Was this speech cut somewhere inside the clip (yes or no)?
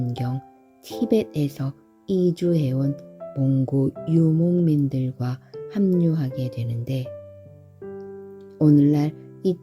no